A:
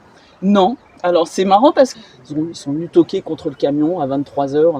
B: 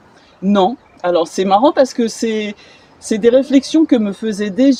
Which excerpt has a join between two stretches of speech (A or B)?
A